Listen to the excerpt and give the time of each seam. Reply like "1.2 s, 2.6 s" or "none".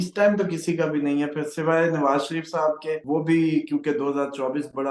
none